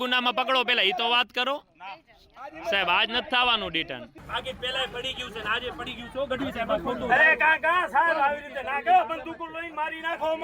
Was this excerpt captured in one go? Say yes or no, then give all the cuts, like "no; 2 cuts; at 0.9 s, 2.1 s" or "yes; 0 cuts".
yes; 0 cuts